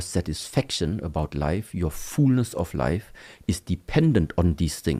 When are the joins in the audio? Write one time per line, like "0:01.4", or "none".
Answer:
none